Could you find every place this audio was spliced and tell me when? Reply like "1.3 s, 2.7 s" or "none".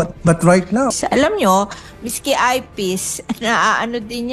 0.9 s